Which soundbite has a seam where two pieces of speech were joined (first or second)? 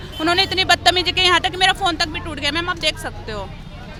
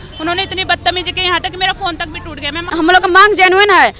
second